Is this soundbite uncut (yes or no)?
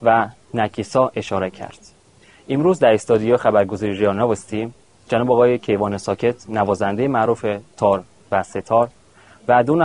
yes